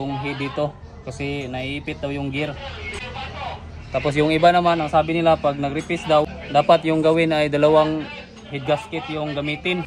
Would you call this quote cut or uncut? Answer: cut